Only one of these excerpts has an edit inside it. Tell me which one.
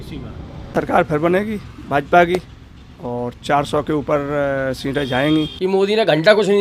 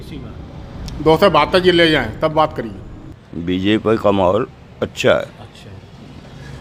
first; 2 cuts; at 0.7 s, 5.6 s

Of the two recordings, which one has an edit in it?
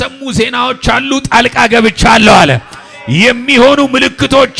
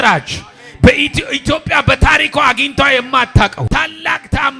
second; 1 cut; at 3.6 s

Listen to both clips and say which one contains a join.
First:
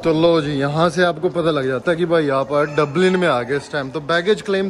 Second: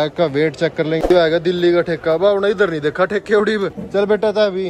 second; 2 cuts; at 1.1 s, 3.8 s

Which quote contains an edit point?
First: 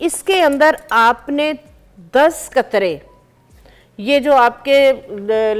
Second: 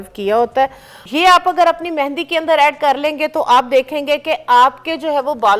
second; 1 cut; at 0.9 s

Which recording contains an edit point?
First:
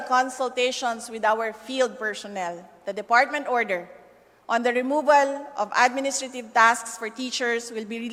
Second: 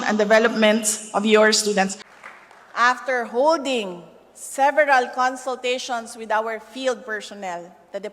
second; 1 cut; at 2.0 s

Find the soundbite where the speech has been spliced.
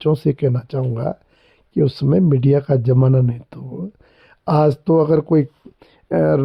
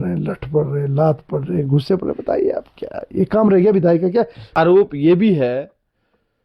second; 1 cut; at 4.4 s

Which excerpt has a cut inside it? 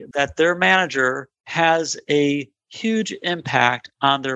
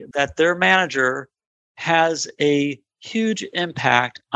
first; 1 cut; at 1.4 s

